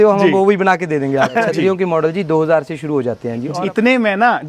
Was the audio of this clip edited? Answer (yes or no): yes